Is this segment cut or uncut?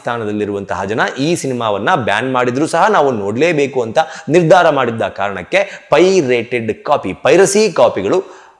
uncut